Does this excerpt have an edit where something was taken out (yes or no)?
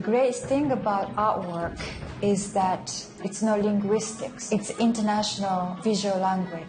yes